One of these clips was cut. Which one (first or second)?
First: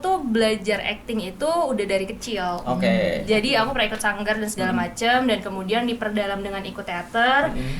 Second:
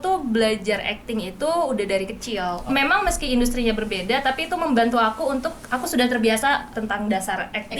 second